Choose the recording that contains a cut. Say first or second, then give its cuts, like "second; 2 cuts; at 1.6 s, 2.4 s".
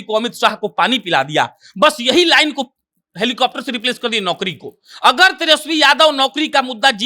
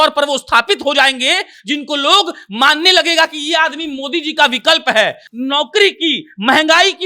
second; 1 cut; at 5.2 s